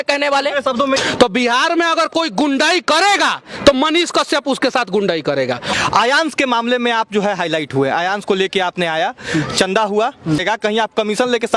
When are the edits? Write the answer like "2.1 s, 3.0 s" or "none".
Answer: 1.0 s, 5.7 s, 10.4 s